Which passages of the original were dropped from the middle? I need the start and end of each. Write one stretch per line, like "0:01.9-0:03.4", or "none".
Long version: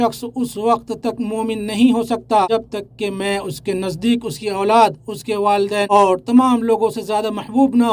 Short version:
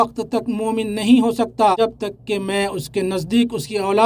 none